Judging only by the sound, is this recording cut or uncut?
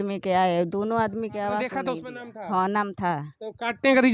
cut